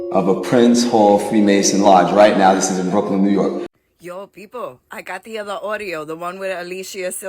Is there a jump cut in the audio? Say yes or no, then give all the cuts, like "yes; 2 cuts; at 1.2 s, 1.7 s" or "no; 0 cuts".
yes; 1 cut; at 3.7 s